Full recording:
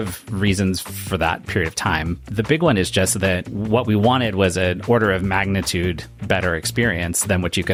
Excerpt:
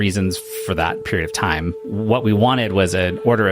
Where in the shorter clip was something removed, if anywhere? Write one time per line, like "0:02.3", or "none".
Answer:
0:01.8